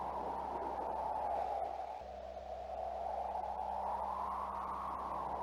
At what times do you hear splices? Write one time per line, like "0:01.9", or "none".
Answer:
none